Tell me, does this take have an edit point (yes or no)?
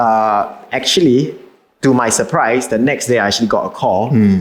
no